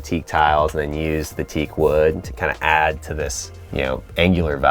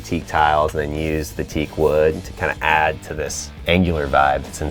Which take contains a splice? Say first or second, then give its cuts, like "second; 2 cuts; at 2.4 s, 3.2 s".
second; 1 cut; at 3.5 s